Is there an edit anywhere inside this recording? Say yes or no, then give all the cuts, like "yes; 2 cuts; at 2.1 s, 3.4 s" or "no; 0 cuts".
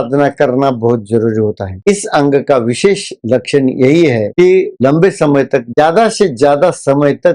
yes; 1 cut; at 5.7 s